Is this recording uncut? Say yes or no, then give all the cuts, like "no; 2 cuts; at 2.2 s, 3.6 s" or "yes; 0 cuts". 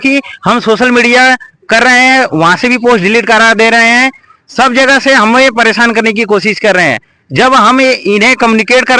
yes; 0 cuts